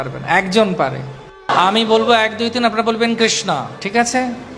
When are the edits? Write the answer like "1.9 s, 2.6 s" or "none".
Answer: 1.5 s

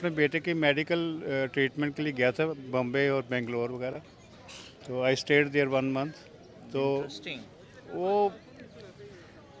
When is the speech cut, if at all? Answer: none

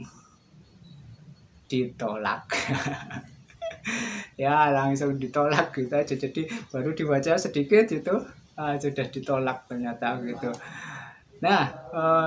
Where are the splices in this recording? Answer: none

